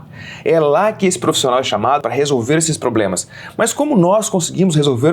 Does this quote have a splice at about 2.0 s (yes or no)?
yes